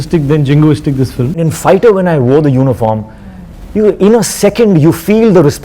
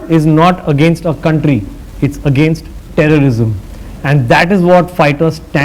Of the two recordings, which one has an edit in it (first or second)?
first